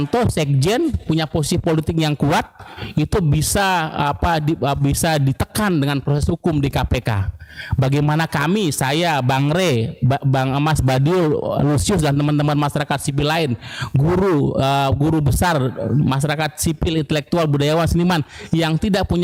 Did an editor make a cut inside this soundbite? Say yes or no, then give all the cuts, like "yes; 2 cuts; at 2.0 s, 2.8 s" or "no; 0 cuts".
no; 0 cuts